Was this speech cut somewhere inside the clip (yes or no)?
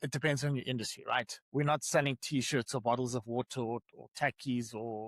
no